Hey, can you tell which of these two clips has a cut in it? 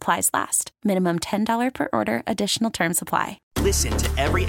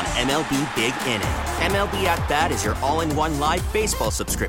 first; 1 cut; at 3.4 s

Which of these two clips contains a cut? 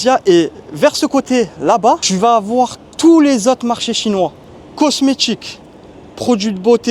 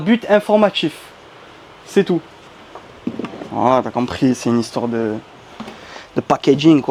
first; 1 cut; at 2.1 s

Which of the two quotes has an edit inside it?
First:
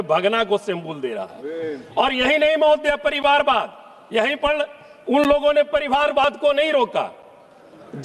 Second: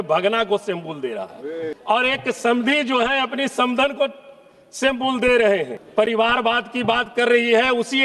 second; 2 cuts; at 1.7 s, 5.8 s

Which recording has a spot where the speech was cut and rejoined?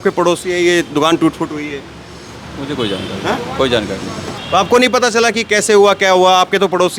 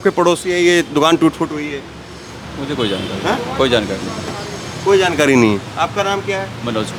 first; 1 cut; at 4.3 s

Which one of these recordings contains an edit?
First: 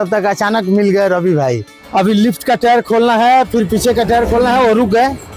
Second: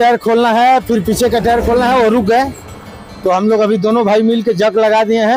first; 1 cut; at 1.7 s

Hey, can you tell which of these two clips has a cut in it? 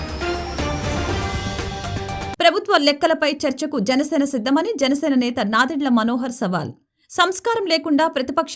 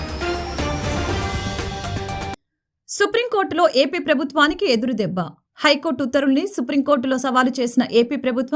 first; 1 cut; at 2.3 s

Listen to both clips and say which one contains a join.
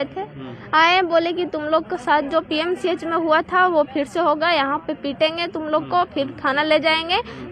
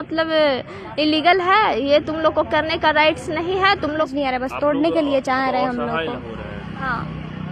second; 1 cut; at 4.1 s

